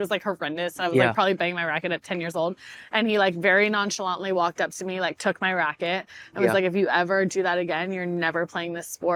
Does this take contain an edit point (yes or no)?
no